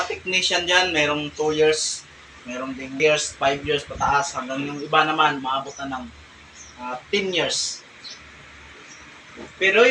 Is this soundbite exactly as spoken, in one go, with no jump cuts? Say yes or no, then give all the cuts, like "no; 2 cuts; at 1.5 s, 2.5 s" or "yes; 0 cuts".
no; 1 cut; at 3.0 s